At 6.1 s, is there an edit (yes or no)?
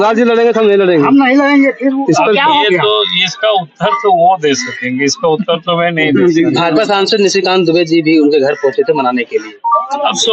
no